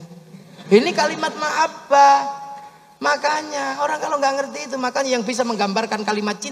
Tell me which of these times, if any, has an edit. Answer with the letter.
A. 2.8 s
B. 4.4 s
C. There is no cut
C